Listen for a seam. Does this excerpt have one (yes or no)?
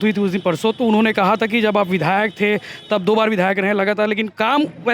no